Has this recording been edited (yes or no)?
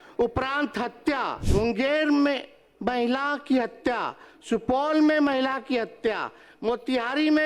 yes